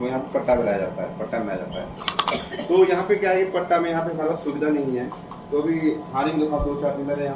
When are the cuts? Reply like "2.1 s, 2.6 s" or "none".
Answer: none